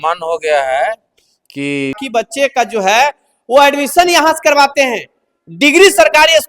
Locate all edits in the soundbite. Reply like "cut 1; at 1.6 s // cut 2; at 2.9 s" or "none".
cut 1; at 2.0 s